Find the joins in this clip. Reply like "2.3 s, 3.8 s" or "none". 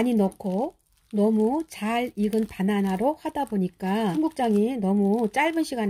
4.1 s